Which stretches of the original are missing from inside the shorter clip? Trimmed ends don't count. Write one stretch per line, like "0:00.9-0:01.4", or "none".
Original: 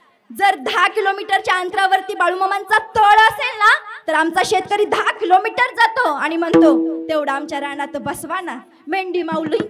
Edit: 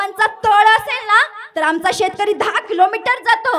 none